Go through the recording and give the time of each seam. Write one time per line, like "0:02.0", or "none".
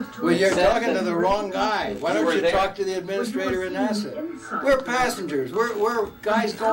none